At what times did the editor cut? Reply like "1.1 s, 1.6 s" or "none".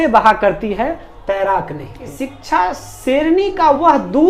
2.1 s